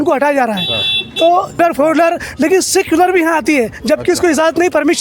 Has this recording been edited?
yes; 1 cut; at 1.6 s

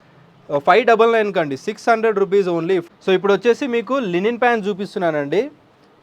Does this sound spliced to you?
yes; 1 cut; at 2.8 s

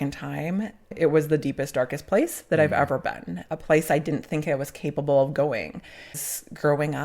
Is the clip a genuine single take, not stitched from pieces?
no; 2 cuts; at 0.9 s, 6.2 s

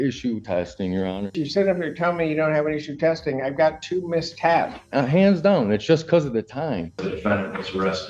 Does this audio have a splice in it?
yes; 3 cuts; at 1.4 s, 4.8 s, 7.1 s

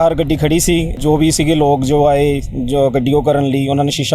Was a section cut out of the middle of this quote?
yes; 1 cut; at 0.9 s

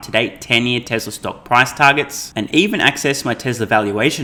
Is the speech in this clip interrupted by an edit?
no; 0 cuts

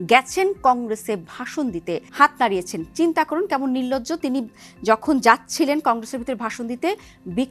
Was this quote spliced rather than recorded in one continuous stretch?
yes; 1 cut; at 2.1 s

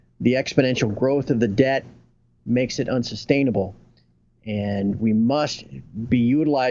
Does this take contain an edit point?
no; 0 cuts

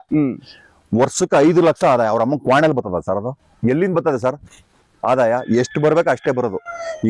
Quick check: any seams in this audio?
no; 0 cuts

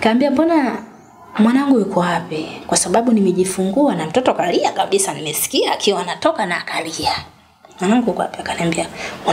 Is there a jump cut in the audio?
no; 0 cuts

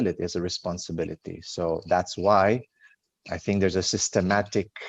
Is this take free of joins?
yes; 0 cuts

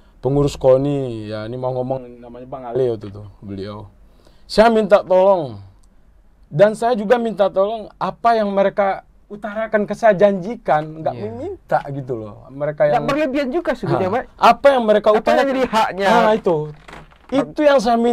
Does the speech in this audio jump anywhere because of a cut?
no; 0 cuts

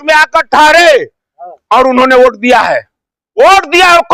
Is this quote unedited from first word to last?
yes; 0 cuts

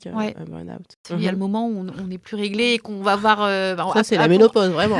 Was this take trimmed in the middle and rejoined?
yes; 1 cut; at 1.0 s

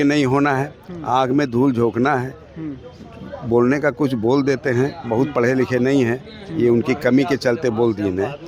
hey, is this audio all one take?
yes; 0 cuts

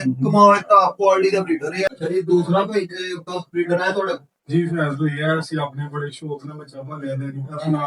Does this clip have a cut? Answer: yes; 1 cut; at 1.9 s

